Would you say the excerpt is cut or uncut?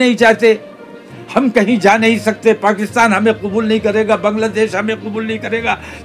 uncut